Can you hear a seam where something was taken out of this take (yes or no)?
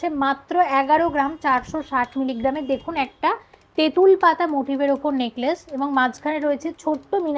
no